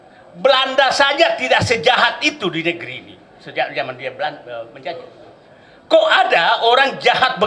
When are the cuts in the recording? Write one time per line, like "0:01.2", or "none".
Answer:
none